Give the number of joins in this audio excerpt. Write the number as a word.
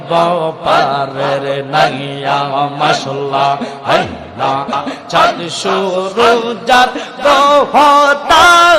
one